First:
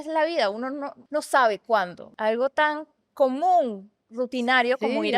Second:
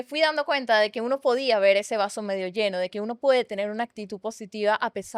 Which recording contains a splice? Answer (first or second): first